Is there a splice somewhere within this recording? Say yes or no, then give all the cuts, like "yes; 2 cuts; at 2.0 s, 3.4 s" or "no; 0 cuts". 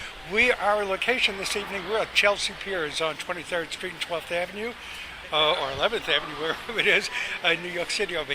no; 0 cuts